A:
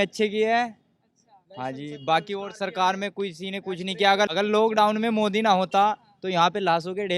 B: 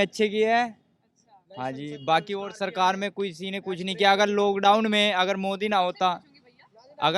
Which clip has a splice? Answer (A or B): A